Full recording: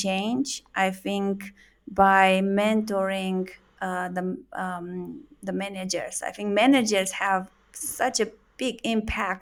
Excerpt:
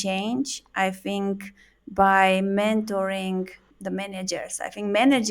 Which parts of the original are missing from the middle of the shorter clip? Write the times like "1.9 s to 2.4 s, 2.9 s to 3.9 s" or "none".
3.6 s to 5.3 s